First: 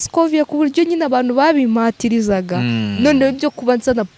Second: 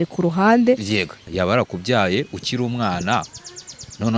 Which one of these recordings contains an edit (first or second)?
second